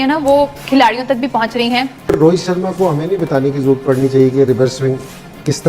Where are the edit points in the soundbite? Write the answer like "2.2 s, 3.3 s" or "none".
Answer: 1.9 s